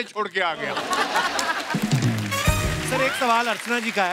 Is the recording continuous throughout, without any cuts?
no; 1 cut; at 2.8 s

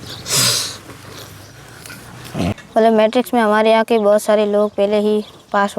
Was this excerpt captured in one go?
no; 1 cut; at 2.5 s

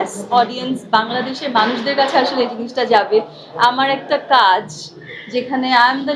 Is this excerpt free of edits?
yes; 0 cuts

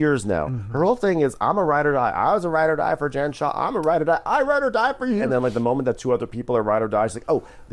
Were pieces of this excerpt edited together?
yes; 1 cut; at 5.3 s

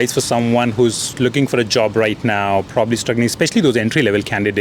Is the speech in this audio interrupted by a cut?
no; 0 cuts

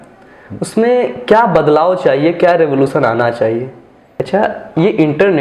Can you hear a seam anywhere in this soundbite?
yes; 1 cut; at 4.1 s

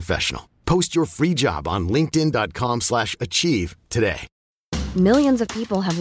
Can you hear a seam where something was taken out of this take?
yes; 1 cut; at 4.3 s

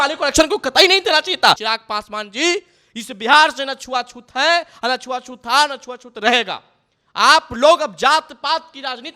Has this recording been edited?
yes; 1 cut; at 1.6 s

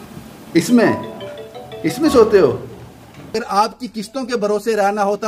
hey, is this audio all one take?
no; 1 cut; at 3.3 s

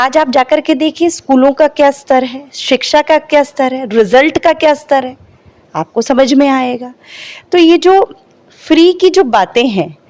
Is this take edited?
no; 0 cuts

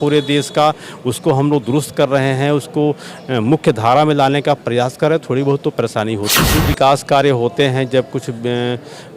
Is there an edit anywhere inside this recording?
yes; 1 cut; at 6.6 s

